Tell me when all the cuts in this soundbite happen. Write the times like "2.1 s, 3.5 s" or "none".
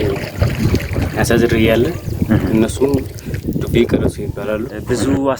4.2 s